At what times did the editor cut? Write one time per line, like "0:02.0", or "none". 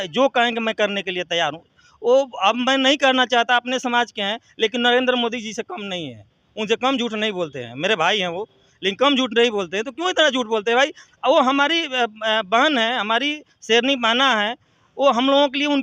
none